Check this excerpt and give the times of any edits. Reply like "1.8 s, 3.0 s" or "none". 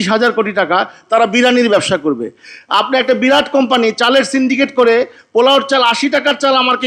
none